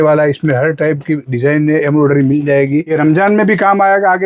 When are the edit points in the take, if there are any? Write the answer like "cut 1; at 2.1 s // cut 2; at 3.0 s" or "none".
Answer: cut 1; at 2.9 s